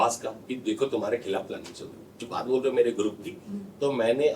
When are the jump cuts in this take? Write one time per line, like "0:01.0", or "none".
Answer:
0:02.2

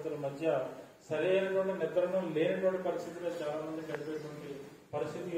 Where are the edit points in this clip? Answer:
none

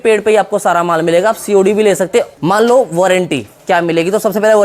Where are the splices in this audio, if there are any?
0:02.3

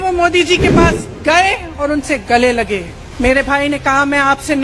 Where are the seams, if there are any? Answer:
0:03.0

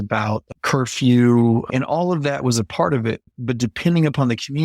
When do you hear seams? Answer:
0:01.7
0:03.3

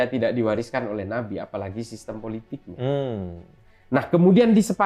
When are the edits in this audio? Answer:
none

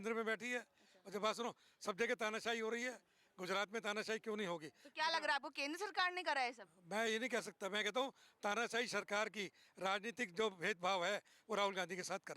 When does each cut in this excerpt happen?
none

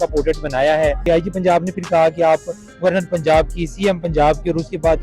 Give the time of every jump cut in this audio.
0:01.0

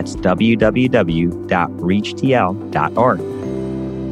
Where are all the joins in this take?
0:03.2

